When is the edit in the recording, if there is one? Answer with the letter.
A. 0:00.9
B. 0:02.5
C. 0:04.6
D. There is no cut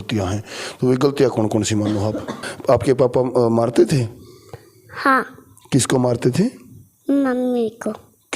B